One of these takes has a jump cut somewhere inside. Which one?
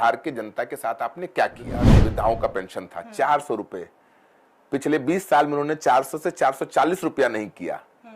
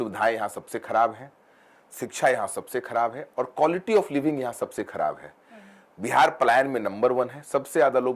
first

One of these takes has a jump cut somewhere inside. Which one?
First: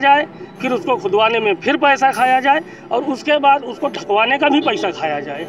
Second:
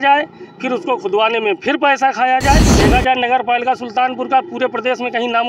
second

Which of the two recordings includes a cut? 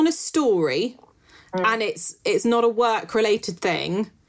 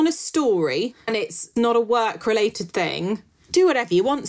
second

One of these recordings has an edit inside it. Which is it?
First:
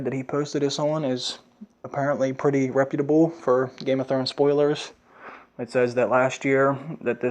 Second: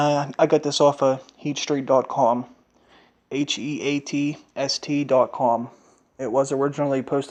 first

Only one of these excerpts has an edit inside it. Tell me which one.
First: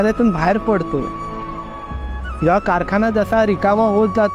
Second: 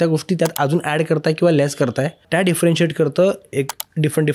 second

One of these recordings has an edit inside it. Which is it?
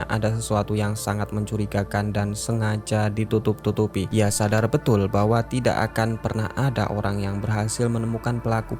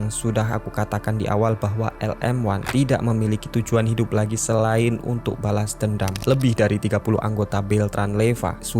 second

